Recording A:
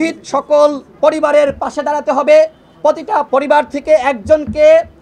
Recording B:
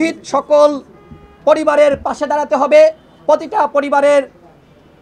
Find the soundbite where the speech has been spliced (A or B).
A